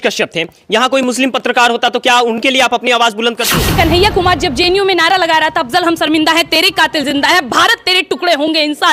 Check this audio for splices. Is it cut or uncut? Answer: cut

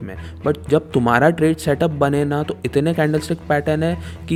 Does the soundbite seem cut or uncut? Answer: uncut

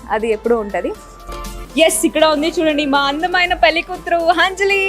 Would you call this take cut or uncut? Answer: cut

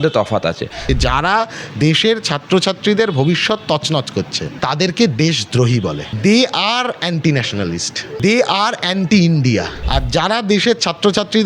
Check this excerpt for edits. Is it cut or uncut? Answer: cut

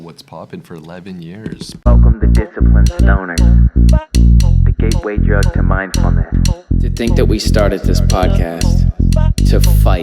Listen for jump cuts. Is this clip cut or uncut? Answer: cut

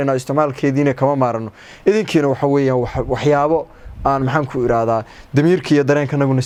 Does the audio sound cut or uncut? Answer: uncut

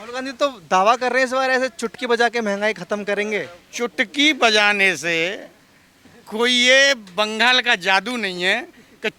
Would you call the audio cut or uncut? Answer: uncut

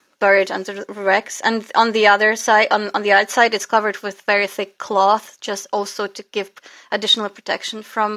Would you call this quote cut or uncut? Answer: uncut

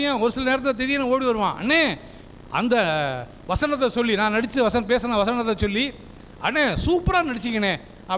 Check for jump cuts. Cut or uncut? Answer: uncut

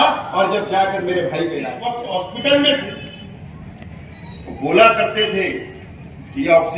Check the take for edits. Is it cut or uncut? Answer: cut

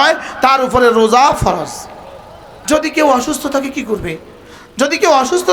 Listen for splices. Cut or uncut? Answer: cut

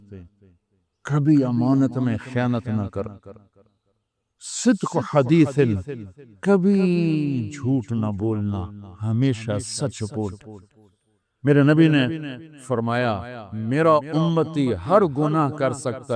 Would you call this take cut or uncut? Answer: uncut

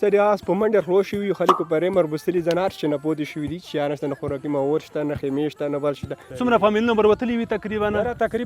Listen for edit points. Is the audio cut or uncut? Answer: cut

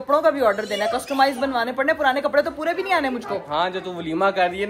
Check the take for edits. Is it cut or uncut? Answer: uncut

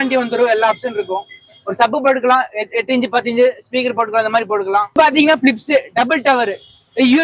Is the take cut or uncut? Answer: cut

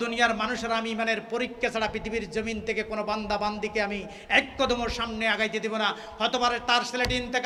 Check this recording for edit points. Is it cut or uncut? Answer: uncut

